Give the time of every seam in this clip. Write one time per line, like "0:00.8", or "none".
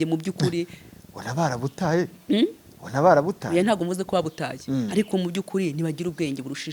none